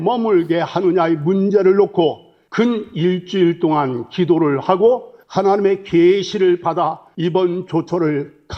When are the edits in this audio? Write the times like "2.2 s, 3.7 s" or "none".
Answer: none